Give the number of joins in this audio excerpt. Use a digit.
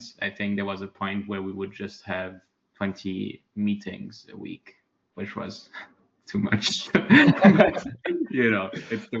0